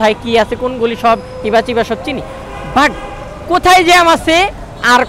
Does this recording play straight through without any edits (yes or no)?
yes